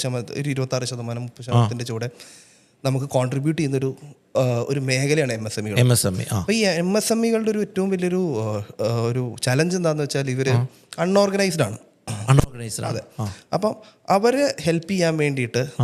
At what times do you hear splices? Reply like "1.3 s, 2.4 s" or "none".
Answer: none